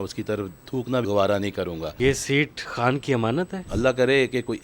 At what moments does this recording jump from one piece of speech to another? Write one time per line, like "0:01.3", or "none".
0:01.0
0:01.9
0:02.6
0:03.6